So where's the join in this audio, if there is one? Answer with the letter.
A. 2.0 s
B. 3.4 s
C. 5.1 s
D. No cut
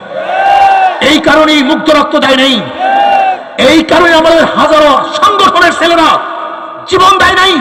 D